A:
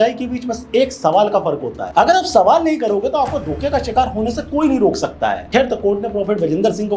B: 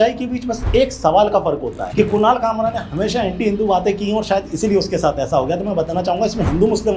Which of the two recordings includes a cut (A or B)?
B